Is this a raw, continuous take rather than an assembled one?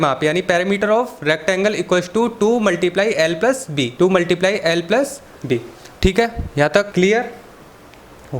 no; 2 cuts; at 3.9 s, 6.9 s

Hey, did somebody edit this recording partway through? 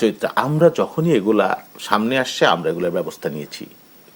no; 0 cuts

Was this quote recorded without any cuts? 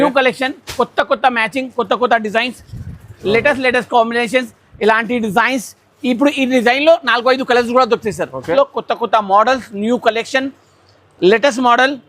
no; 1 cut; at 8.5 s

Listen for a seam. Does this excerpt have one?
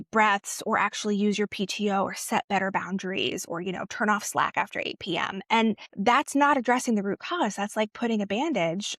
yes; 1 cut; at 5.9 s

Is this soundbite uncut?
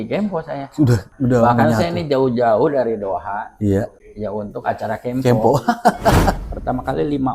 no; 3 cuts; at 1.1 s, 4.0 s, 6.5 s

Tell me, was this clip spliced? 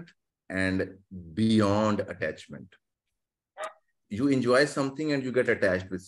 yes; 1 cut; at 4.0 s

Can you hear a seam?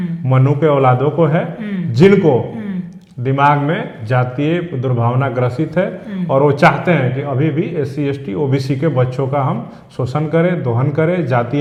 no; 0 cuts

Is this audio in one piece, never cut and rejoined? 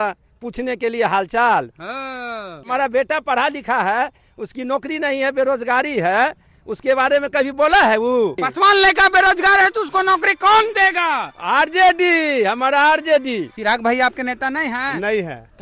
no; 3 cuts; at 2.6 s, 8.5 s, 13.5 s

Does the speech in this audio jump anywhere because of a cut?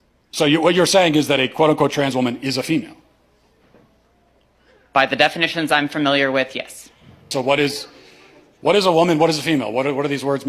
yes; 1 cut; at 7.3 s

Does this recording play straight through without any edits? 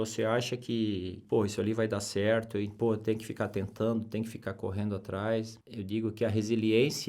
no; 3 cuts; at 1.2 s, 2.7 s, 5.6 s

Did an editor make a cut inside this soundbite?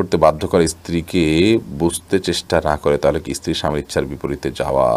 no; 0 cuts

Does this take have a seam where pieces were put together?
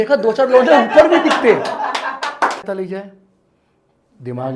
yes; 1 cut; at 2.6 s

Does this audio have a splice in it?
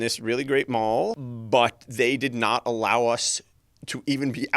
yes; 1 cut; at 1.2 s

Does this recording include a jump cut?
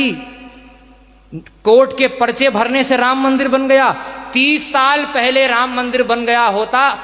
no; 0 cuts

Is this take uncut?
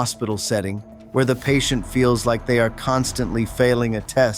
no; 1 cut; at 1.0 s

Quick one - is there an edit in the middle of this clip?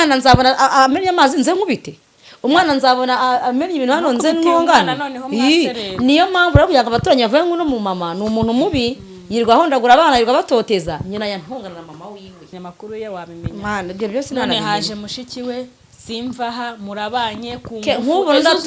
yes; 1 cut; at 12.5 s

